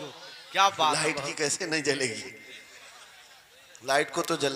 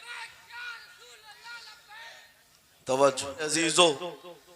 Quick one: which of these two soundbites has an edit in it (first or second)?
second